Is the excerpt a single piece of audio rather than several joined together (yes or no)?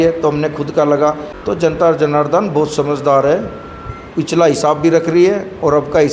no